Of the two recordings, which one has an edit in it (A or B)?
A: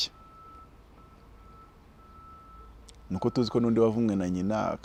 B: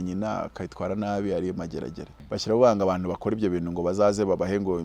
B